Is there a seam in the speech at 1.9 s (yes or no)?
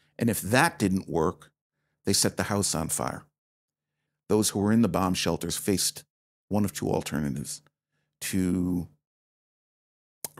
no